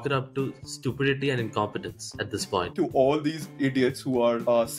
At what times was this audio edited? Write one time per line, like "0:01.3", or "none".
0:02.7